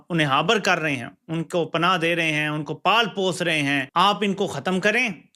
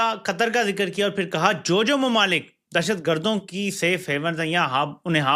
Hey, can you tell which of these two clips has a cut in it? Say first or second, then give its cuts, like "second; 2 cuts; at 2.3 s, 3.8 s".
first; 1 cut; at 3.9 s